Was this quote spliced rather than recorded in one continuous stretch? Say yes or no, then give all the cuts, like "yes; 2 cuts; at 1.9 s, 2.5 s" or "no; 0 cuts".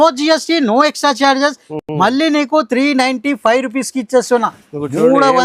no; 0 cuts